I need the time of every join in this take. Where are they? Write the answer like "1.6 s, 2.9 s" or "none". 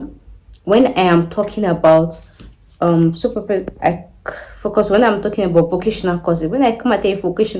none